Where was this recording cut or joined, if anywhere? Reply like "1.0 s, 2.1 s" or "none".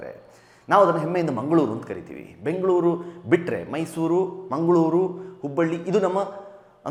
none